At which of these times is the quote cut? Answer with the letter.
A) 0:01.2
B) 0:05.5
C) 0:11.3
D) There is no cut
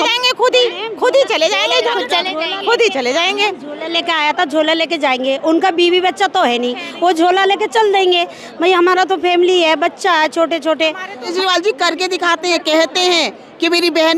C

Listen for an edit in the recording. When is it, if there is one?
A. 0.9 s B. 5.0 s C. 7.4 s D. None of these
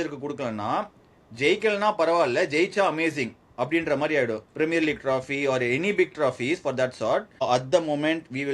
C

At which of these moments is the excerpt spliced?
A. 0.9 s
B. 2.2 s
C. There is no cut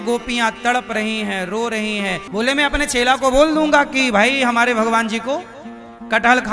B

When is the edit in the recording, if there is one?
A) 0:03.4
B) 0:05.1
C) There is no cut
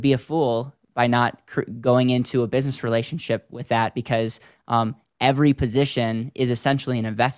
C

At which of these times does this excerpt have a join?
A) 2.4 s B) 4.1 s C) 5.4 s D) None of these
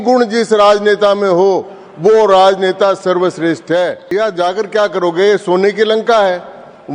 B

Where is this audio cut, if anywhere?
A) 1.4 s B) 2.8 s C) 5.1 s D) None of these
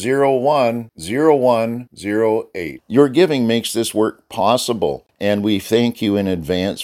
C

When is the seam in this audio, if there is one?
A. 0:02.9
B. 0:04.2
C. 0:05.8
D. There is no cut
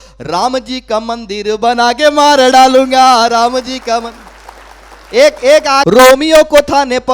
C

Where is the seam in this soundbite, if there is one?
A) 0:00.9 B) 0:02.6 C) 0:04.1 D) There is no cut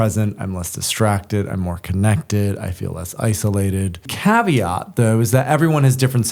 C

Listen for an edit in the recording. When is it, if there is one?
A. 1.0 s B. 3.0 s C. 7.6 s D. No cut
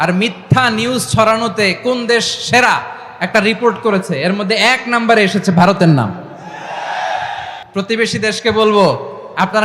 C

